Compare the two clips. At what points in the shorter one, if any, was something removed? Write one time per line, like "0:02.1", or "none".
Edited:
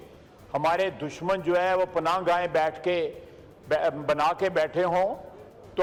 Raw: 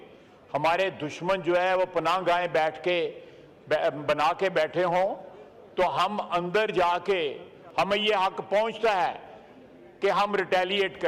none

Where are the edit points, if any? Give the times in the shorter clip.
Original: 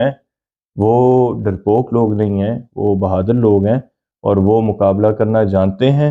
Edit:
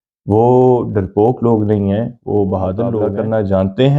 0:03.1

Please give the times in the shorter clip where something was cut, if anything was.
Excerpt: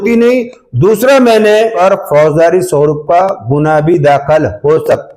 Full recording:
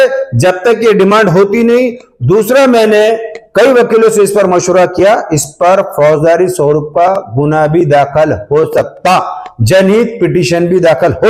0:01.7

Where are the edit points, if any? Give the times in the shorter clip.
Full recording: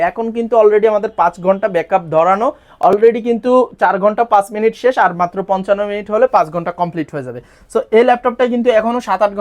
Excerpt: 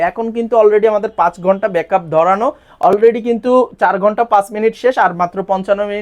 none

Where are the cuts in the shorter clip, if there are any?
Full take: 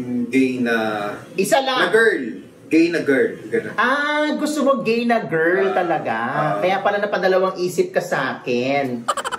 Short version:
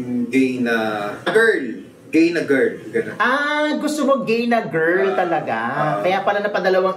0:01.3

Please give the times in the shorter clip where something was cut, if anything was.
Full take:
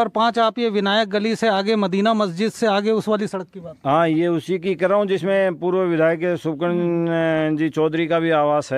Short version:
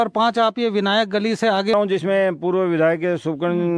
0:01.7

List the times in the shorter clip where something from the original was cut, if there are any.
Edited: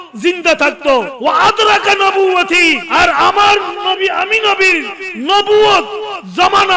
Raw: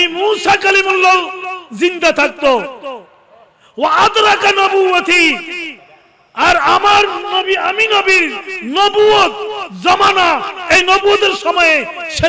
0:01.1
0:02.8

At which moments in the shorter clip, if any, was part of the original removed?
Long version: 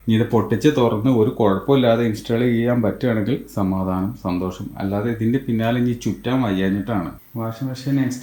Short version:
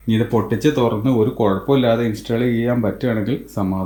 none

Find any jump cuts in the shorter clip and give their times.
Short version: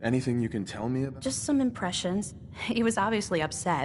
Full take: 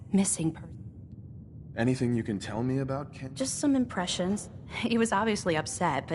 0:01.1

